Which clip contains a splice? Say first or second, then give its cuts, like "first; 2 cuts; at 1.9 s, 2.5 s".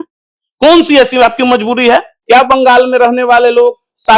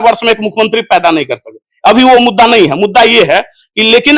first; 1 cut; at 2.1 s